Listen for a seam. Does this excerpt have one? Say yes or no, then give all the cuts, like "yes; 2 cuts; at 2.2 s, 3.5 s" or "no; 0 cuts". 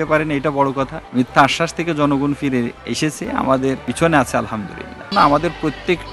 yes; 4 cuts; at 1.0 s, 2.8 s, 3.9 s, 5.1 s